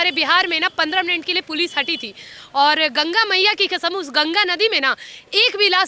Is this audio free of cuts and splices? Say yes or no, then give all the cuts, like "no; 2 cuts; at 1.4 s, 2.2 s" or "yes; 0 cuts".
yes; 0 cuts